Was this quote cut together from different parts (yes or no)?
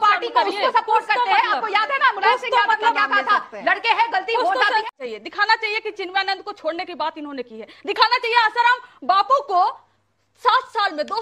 yes